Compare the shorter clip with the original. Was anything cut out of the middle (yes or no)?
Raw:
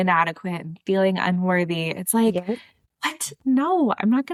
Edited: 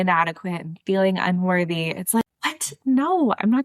yes